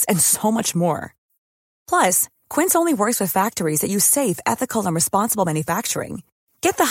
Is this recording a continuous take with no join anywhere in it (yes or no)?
yes